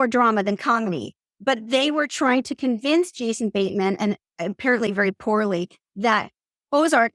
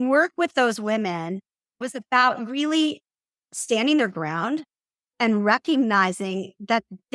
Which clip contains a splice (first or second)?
second